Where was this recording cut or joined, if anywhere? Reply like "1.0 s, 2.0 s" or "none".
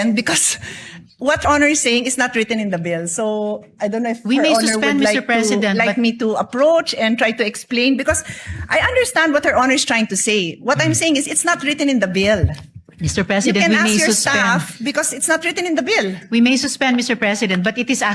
1.4 s